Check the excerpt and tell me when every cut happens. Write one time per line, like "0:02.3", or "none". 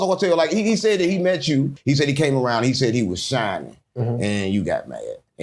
0:01.7

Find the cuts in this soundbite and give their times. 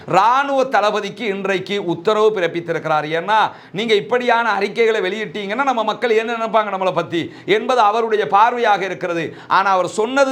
none

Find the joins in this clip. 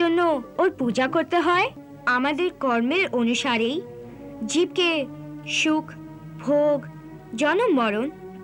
0:01.9

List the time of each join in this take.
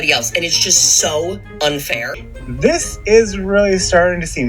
0:02.1

